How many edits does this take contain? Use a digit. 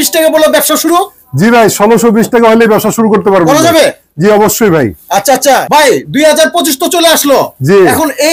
0